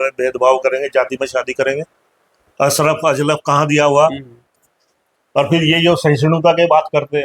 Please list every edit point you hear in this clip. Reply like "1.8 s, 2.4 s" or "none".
4.4 s